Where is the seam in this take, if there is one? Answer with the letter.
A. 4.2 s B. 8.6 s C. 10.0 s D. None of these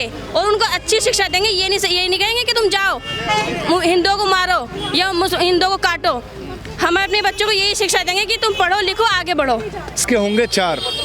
C